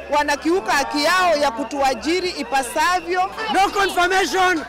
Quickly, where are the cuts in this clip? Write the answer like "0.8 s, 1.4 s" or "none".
3.4 s